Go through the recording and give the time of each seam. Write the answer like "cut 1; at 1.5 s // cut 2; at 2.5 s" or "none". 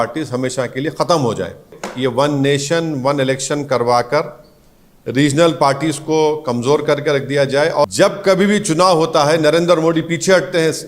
cut 1; at 1.8 s // cut 2; at 7.8 s